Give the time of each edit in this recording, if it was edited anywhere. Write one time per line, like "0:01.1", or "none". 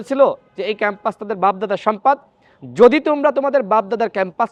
none